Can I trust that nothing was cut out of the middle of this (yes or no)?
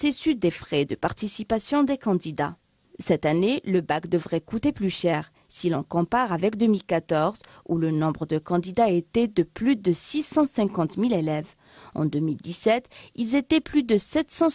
yes